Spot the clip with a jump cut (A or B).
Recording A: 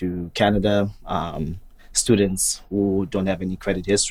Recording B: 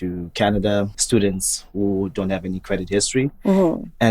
B